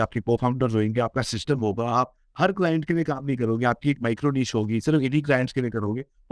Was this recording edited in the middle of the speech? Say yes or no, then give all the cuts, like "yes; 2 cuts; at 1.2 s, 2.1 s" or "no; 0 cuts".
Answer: no; 0 cuts